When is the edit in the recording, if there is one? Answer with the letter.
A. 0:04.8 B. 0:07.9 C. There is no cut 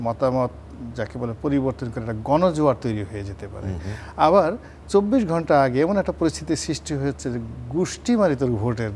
C